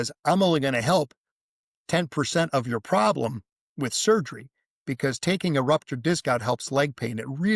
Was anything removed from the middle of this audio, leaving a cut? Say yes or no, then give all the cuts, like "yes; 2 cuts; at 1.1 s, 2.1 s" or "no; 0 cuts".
no; 0 cuts